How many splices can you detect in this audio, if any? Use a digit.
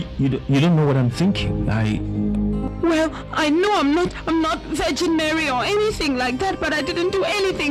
1